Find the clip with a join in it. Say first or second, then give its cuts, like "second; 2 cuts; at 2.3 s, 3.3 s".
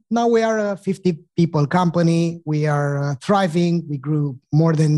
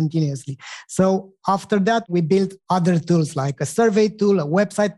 second; 2 cuts; at 2.1 s, 3.7 s